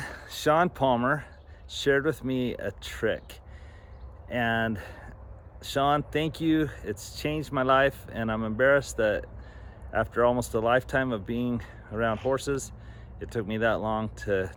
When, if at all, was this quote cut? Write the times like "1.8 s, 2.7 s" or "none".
none